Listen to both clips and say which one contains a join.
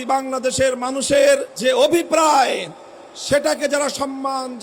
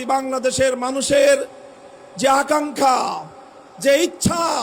first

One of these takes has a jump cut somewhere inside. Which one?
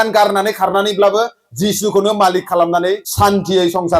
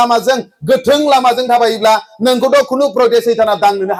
first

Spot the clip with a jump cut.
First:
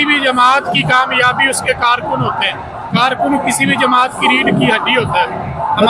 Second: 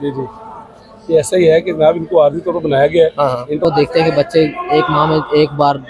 second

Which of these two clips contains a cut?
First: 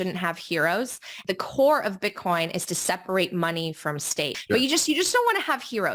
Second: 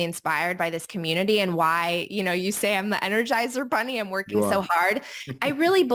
first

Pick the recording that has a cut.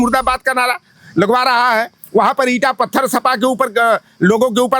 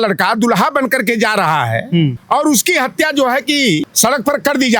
second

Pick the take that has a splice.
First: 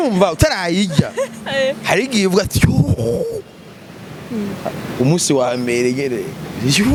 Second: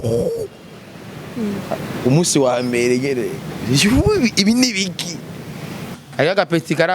second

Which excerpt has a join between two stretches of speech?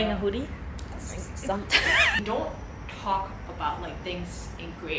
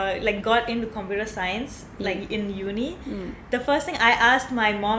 first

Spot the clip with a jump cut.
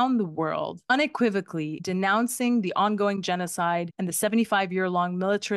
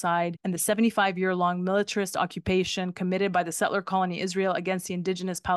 first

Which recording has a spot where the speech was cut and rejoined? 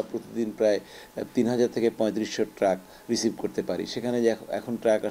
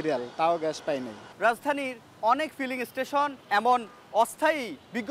second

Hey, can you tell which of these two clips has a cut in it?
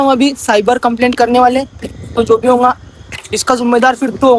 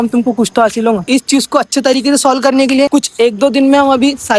second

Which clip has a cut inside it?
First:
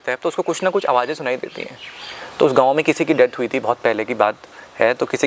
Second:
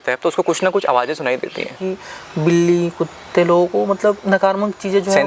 second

